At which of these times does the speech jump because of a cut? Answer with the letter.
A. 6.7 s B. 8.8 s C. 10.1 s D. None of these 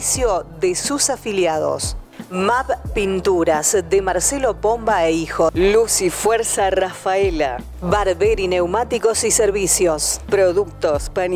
C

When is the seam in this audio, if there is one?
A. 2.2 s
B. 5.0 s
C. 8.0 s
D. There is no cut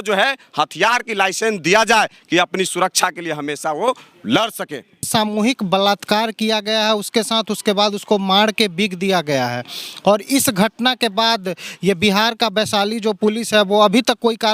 B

